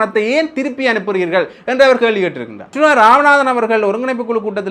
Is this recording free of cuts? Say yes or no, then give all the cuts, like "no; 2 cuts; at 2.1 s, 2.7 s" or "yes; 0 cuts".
no; 1 cut; at 2.7 s